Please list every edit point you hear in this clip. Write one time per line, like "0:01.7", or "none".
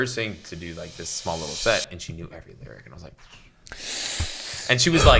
none